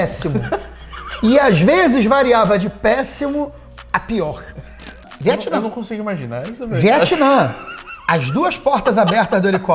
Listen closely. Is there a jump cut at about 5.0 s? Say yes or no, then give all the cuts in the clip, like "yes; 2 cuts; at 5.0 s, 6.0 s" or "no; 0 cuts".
yes; 1 cut; at 5.0 s